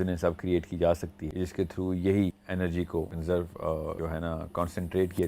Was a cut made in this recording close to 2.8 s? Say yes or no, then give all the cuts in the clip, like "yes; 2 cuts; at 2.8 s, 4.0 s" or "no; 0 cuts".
yes; 3 cuts; at 1.2 s, 2.8 s, 3.9 s